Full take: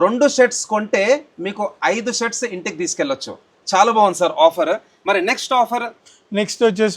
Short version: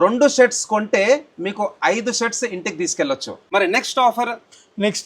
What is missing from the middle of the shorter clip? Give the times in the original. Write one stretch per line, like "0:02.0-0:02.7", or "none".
0:03.4-0:04.9